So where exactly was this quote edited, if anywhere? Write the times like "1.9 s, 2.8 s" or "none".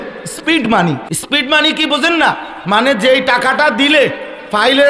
1.1 s